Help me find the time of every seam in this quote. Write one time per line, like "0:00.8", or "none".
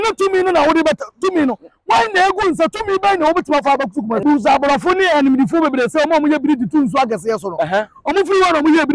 0:04.2